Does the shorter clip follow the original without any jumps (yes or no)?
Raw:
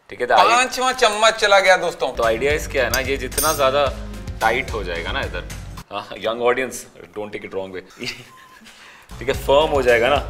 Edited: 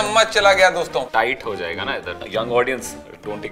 no